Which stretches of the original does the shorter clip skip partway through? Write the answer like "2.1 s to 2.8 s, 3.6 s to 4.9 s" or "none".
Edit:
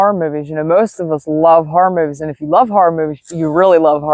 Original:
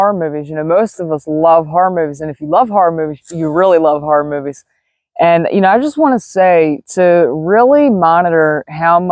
none